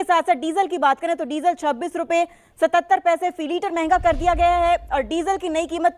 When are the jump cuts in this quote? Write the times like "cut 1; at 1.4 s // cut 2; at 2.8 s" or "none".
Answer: none